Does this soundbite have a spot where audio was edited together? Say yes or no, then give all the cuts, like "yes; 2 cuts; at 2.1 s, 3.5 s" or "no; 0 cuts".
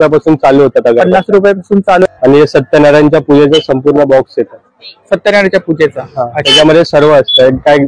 yes; 1 cut; at 2.0 s